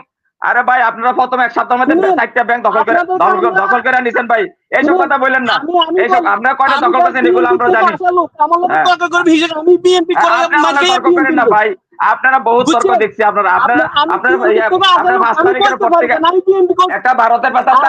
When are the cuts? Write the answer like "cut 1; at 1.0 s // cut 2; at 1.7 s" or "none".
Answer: cut 1; at 16.9 s